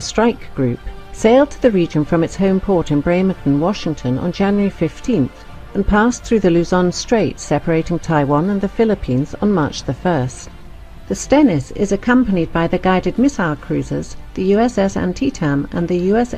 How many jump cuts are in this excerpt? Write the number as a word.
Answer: one